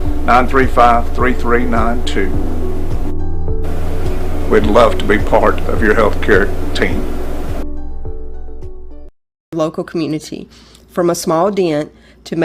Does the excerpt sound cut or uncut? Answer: cut